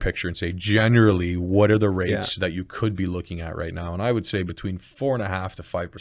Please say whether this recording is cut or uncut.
uncut